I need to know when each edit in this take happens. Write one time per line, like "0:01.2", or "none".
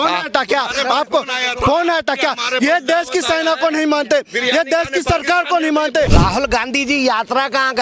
0:06.1